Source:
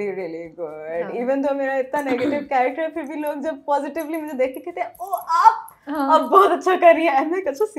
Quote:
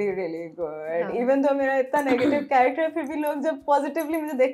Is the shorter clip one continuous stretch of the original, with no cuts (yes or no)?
yes